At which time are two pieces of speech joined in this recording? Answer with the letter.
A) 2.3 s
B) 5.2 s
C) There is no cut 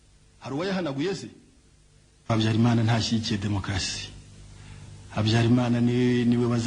A